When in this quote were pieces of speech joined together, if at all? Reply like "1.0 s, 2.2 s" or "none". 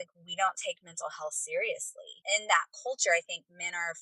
2.1 s